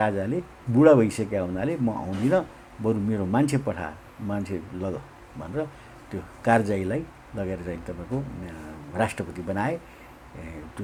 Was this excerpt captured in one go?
yes; 0 cuts

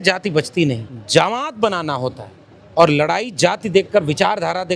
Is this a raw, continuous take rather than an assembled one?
no; 1 cut; at 0.9 s

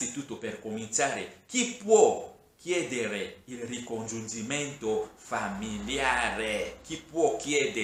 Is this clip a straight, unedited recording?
yes; 0 cuts

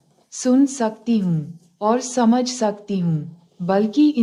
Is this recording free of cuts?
yes; 0 cuts

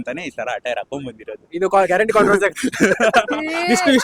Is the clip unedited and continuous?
yes; 0 cuts

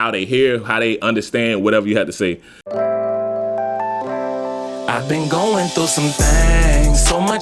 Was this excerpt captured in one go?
no; 1 cut; at 2.7 s

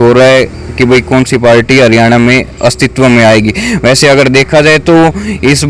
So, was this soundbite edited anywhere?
no; 0 cuts

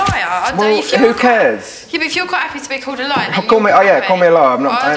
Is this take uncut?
yes; 0 cuts

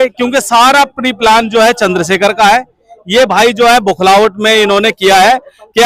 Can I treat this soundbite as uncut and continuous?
yes; 0 cuts

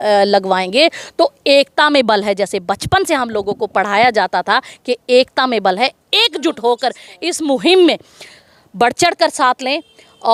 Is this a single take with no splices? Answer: yes; 0 cuts

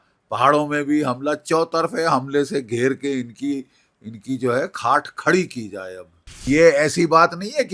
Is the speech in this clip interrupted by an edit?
yes; 1 cut; at 6.4 s

